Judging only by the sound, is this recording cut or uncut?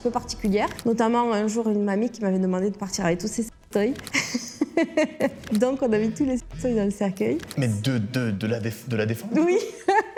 uncut